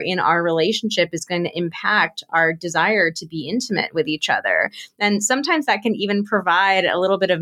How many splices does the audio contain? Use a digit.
0